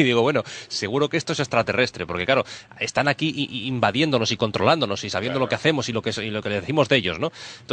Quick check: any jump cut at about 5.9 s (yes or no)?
yes